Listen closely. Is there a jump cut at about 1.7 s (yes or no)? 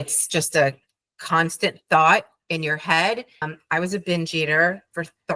no